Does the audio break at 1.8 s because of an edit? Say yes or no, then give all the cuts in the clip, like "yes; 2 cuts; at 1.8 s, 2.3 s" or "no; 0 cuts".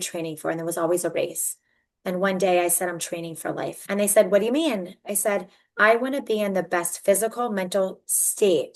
no; 1 cut; at 3.8 s